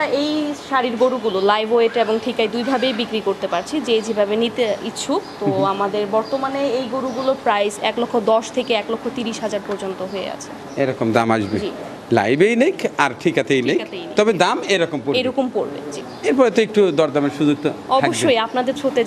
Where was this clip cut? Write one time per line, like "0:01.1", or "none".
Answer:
none